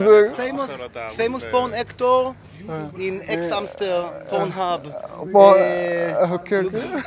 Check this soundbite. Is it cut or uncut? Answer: uncut